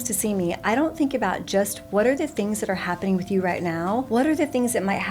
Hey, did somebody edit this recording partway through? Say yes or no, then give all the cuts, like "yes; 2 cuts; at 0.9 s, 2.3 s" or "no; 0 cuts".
yes; 1 cut; at 4.1 s